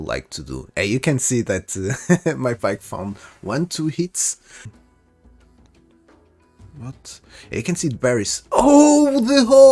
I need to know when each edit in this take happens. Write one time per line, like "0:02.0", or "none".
0:04.7